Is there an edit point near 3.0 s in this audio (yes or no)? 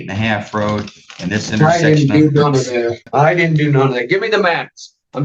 yes